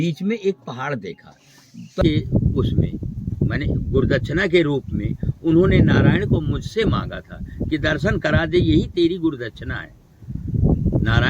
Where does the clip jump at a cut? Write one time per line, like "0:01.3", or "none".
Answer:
0:02.0